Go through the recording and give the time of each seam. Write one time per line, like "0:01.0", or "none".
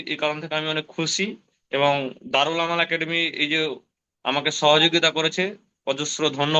none